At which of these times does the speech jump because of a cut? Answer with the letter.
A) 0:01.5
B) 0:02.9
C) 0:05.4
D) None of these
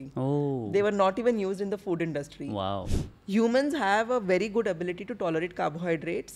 B